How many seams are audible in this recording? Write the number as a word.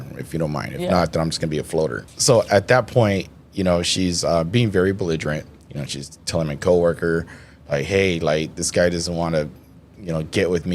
one